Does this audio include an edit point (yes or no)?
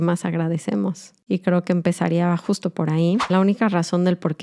yes